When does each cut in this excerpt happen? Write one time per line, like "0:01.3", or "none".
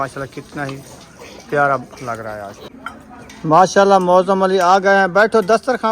0:02.7

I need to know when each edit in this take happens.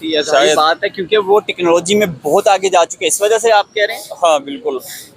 none

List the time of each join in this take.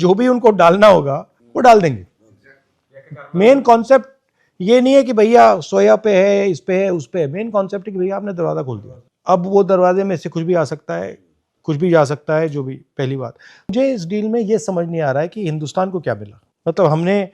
0:13.7

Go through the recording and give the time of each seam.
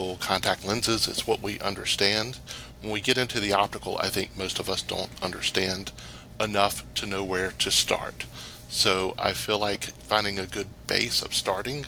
none

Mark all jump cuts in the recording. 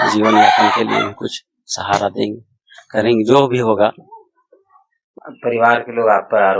0:05.1

